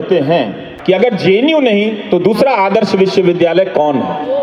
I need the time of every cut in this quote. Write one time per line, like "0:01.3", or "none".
0:01.0